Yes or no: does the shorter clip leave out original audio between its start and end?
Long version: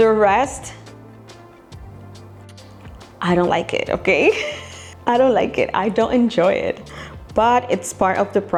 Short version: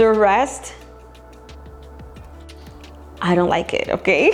no